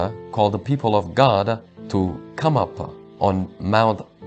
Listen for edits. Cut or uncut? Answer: uncut